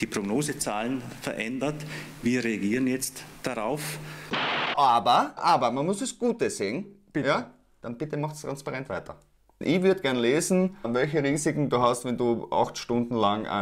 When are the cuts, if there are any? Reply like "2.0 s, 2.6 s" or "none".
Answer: 4.1 s, 9.6 s